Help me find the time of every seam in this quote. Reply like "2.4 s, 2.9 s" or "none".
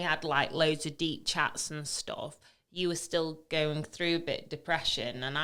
none